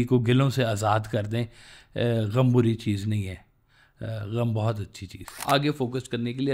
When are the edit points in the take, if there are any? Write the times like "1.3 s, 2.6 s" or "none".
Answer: 5.4 s